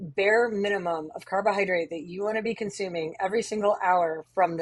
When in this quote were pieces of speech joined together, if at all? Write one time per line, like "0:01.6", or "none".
none